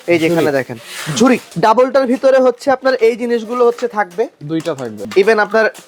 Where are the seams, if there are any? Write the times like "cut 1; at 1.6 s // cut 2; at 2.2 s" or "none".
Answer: cut 1; at 1.5 s // cut 2; at 5.0 s